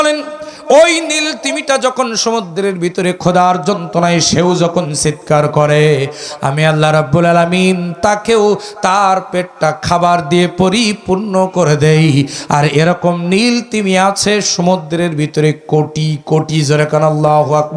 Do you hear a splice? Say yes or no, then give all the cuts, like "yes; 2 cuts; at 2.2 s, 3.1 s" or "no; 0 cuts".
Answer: no; 0 cuts